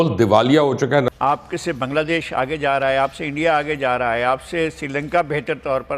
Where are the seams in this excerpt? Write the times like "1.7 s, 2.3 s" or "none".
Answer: 1.1 s